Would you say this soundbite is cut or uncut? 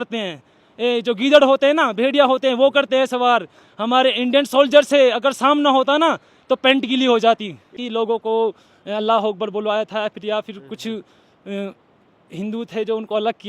cut